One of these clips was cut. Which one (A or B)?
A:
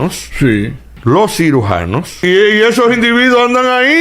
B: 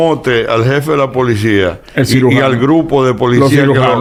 A